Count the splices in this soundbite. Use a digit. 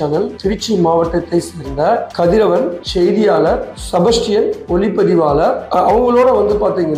0